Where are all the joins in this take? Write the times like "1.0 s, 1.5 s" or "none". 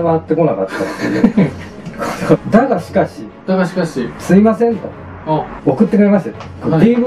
2.4 s, 5.5 s